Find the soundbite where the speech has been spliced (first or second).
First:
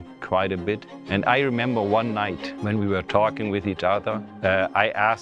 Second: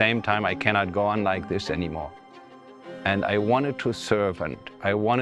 first